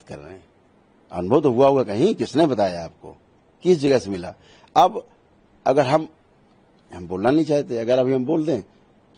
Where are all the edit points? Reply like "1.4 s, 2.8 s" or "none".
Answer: none